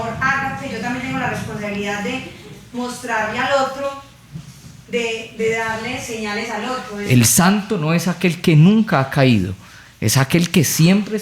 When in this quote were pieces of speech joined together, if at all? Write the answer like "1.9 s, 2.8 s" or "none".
6.9 s